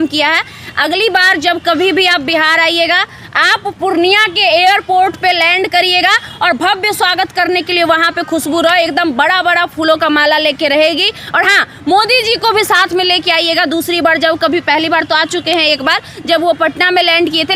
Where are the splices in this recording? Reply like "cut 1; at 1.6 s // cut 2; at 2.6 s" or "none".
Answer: none